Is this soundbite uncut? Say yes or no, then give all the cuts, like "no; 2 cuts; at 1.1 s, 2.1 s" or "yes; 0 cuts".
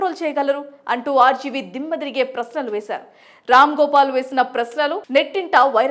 no; 1 cut; at 5.0 s